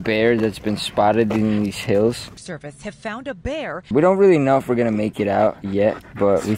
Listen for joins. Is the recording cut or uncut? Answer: cut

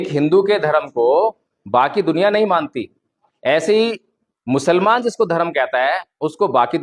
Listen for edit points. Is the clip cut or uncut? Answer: uncut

